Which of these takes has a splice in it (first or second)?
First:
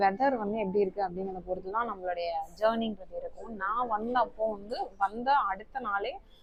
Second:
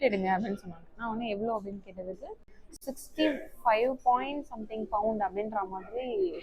second